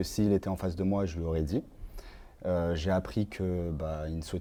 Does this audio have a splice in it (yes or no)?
no